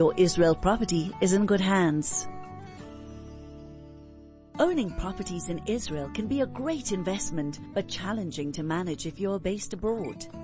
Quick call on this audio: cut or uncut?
cut